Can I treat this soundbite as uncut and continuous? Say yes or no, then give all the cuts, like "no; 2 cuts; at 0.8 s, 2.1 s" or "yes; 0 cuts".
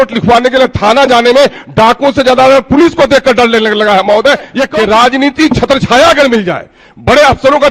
no; 1 cut; at 4.6 s